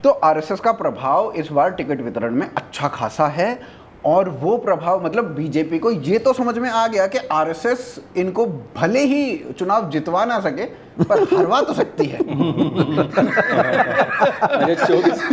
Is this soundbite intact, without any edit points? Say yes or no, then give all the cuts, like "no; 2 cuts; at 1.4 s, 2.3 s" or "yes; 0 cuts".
yes; 0 cuts